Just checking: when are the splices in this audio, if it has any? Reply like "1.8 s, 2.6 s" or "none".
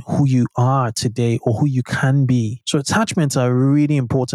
2.6 s